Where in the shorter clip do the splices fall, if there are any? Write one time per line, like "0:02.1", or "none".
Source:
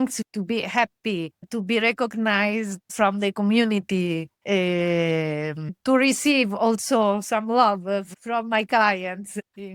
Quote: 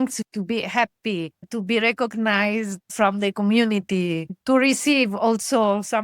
0:04.3